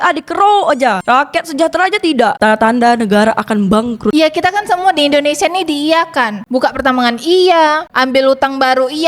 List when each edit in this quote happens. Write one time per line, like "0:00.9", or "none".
0:02.4
0:04.1